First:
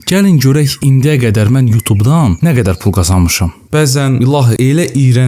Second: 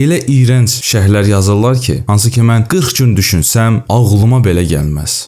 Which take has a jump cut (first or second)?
first